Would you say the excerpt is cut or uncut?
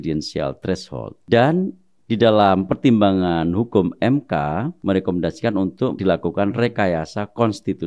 cut